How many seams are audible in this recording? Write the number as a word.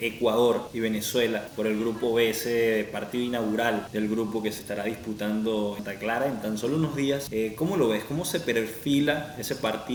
zero